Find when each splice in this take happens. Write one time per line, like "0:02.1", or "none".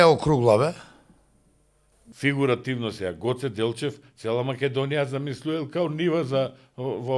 0:02.0